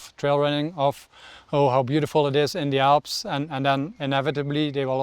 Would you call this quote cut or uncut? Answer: uncut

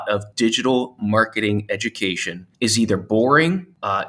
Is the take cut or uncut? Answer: uncut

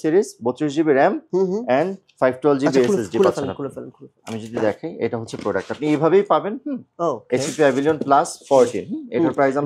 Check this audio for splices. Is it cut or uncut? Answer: uncut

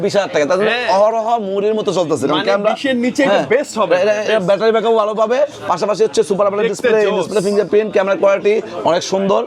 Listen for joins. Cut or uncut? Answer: uncut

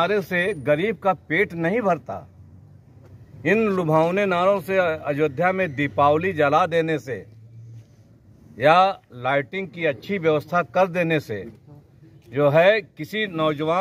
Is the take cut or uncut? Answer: uncut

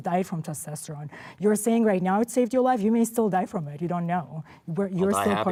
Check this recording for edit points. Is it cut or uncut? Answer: uncut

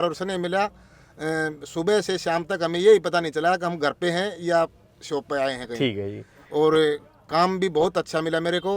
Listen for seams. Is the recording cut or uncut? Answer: uncut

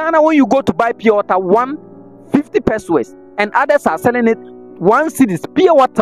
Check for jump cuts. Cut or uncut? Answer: uncut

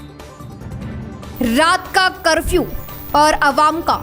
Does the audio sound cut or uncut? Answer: cut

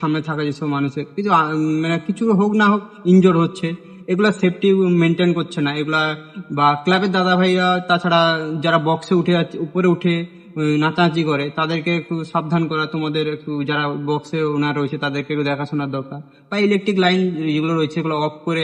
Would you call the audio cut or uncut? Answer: uncut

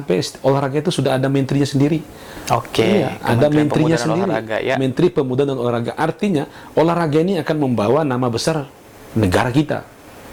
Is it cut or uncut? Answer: uncut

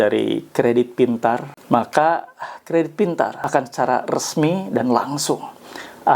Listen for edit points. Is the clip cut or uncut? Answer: cut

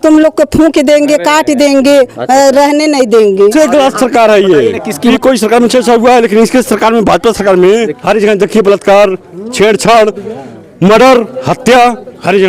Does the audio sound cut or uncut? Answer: cut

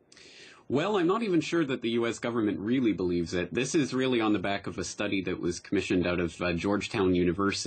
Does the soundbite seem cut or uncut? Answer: cut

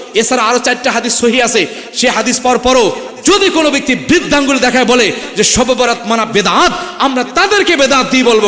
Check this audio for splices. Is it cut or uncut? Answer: uncut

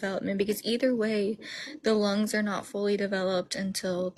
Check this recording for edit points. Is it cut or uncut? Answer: uncut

